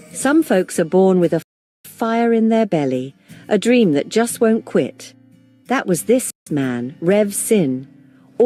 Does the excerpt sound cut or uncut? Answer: uncut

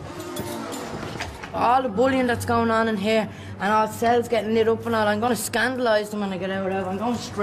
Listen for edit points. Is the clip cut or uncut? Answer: uncut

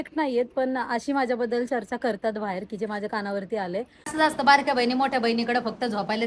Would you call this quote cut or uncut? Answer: cut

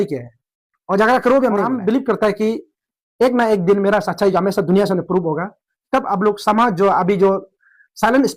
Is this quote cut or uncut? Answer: cut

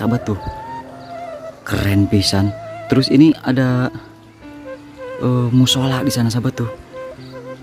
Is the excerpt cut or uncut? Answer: uncut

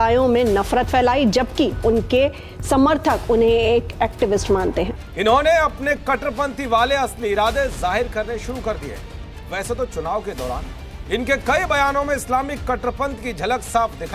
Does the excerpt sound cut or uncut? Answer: cut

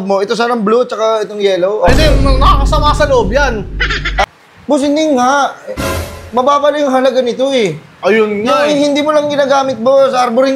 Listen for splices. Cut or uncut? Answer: cut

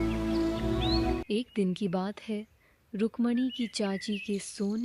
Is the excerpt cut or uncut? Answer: cut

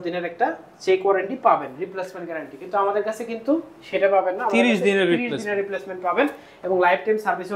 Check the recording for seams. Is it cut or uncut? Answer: uncut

